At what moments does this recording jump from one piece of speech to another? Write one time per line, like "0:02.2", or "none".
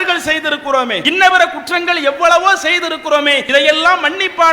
0:01.0
0:03.4